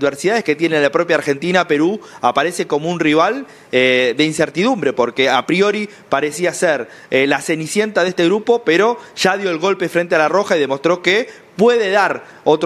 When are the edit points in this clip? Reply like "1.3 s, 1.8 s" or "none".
none